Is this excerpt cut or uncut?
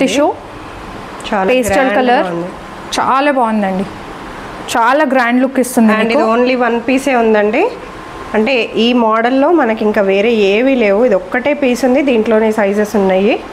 uncut